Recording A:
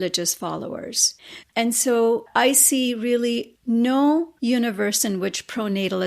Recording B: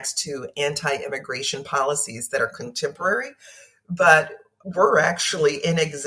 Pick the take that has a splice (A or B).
A